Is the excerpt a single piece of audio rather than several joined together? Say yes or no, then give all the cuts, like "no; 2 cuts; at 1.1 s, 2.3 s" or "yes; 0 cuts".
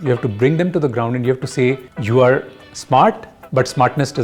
no; 2 cuts; at 1.9 s, 3.3 s